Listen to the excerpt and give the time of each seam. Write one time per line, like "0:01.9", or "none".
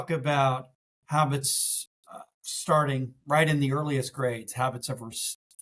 none